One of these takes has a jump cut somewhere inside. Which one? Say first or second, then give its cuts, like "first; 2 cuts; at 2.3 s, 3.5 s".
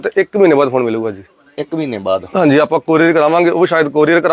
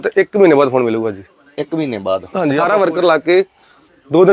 second; 1 cut; at 2.5 s